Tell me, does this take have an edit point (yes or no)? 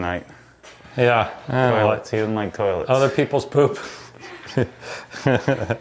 no